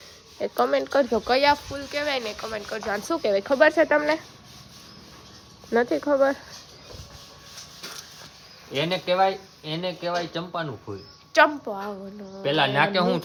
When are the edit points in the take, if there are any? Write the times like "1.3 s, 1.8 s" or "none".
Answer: none